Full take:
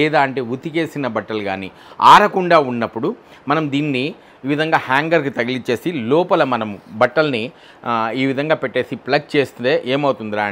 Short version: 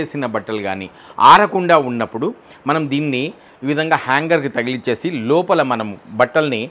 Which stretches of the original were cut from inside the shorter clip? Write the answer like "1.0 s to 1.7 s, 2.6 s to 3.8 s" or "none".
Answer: none